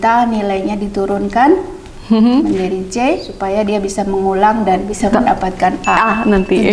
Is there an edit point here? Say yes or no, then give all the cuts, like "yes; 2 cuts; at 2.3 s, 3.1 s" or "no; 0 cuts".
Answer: no; 0 cuts